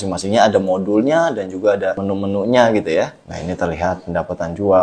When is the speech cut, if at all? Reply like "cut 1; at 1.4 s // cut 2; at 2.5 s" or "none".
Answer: cut 1; at 2.0 s // cut 2; at 3.3 s